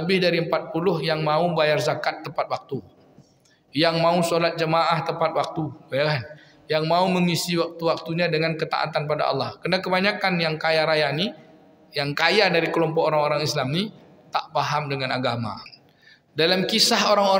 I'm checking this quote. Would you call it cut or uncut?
cut